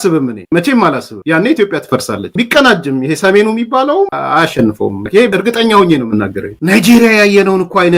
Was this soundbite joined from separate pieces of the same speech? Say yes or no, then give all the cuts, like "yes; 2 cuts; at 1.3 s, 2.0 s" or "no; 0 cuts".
yes; 4 cuts; at 2.3 s, 4.1 s, 5.3 s, 6.5 s